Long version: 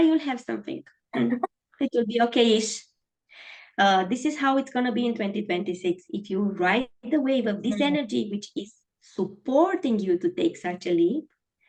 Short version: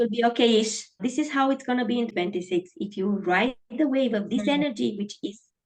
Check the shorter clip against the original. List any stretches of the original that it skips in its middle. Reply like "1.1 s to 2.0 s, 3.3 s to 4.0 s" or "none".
3.0 s to 4.1 s, 5.2 s to 5.4 s